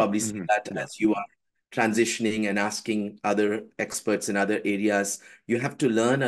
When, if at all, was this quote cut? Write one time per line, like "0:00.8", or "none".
none